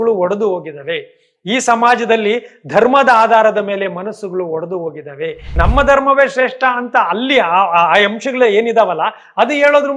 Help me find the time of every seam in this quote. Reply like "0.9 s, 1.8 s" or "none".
5.4 s